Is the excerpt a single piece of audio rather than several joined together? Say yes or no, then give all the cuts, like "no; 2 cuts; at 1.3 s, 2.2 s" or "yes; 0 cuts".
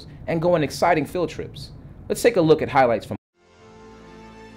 yes; 0 cuts